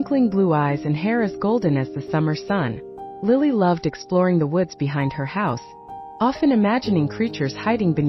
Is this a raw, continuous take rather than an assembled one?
yes; 0 cuts

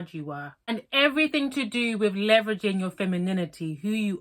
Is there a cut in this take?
no; 0 cuts

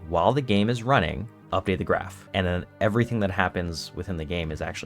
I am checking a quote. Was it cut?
yes; 2 cuts; at 1.3 s, 2.2 s

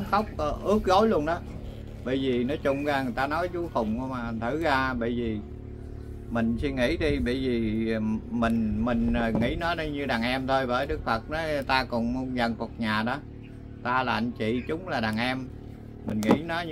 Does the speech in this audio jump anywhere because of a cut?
no; 0 cuts

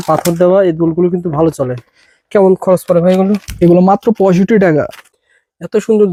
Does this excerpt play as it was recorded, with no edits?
yes; 0 cuts

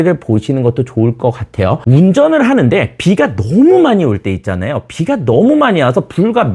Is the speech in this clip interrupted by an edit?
yes; 1 cut; at 1.8 s

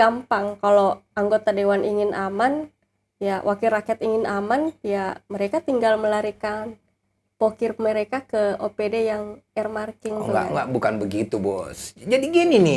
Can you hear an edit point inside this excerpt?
no; 0 cuts

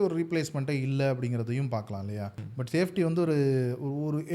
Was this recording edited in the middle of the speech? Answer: yes; 1 cut; at 2.3 s

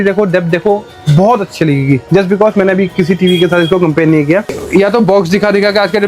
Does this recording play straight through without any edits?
no; 1 cut; at 4.6 s

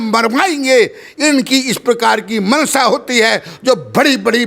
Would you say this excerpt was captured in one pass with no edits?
yes; 0 cuts

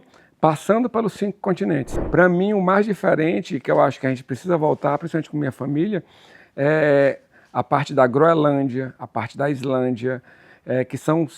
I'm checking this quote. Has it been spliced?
yes; 1 cut; at 1.9 s

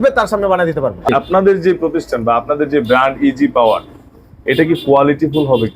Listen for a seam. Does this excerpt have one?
yes; 1 cut; at 1.1 s

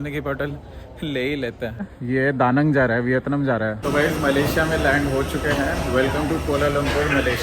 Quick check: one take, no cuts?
no; 2 cuts; at 1.8 s, 3.8 s

